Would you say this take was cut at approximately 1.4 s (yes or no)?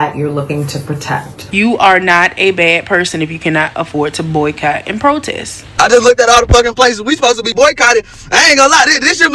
yes